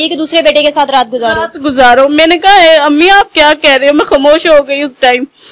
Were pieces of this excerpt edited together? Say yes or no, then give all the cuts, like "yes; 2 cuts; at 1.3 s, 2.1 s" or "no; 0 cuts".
no; 0 cuts